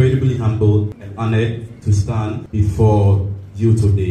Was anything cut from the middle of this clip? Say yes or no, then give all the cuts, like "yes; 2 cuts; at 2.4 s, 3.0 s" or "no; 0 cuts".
yes; 2 cuts; at 1.0 s, 2.4 s